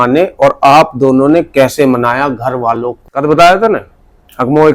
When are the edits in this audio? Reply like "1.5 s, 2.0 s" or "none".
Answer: 3.0 s

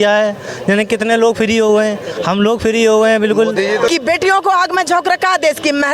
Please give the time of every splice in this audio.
3.9 s

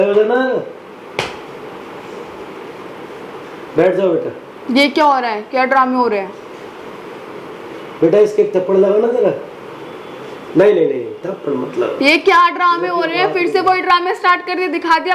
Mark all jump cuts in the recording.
none

